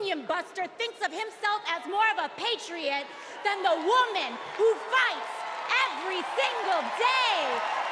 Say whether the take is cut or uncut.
uncut